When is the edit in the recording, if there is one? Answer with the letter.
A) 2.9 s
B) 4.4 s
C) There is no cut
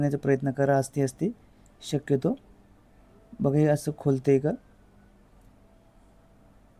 C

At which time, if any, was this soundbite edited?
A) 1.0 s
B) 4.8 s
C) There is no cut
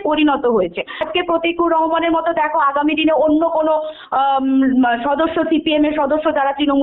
A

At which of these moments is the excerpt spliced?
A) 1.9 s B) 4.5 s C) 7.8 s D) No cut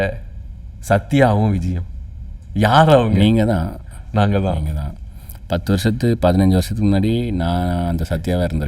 D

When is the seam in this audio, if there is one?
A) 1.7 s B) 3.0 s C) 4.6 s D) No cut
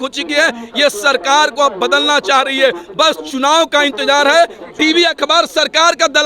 C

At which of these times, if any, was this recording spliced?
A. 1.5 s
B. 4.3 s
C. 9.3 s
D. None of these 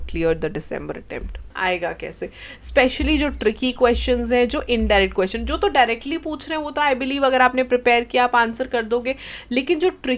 A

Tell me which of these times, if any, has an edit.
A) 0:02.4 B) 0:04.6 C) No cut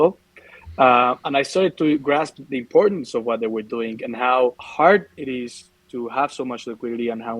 B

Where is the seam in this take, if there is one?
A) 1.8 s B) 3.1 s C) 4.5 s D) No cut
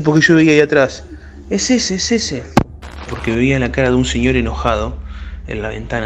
B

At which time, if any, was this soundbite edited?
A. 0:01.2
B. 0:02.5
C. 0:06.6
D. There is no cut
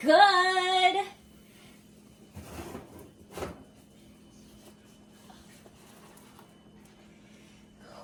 D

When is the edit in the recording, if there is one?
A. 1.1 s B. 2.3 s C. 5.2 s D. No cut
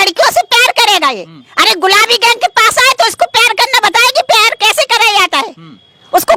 D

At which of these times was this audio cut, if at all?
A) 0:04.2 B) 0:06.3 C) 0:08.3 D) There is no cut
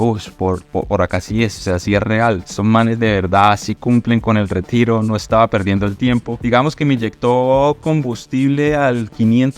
B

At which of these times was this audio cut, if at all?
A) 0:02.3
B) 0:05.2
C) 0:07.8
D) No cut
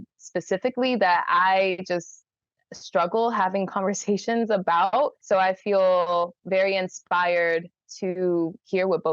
B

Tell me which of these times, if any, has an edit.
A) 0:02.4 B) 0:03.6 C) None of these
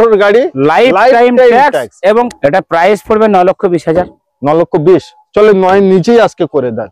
A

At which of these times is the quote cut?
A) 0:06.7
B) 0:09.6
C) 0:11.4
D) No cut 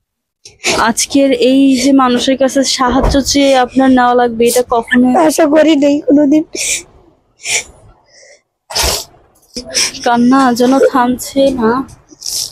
B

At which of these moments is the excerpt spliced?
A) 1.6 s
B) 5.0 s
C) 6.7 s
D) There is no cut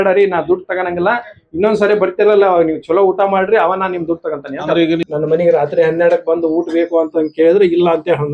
B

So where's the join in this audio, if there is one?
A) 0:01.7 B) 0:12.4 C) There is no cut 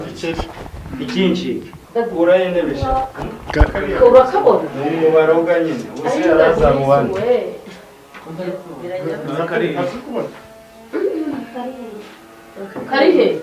A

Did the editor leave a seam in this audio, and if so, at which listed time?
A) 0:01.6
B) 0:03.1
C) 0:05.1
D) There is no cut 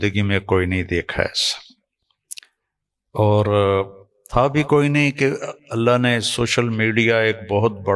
D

